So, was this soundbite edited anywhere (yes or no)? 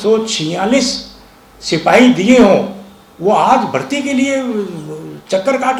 no